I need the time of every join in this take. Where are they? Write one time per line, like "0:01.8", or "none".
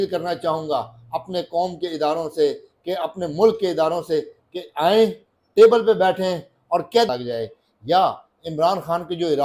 0:07.1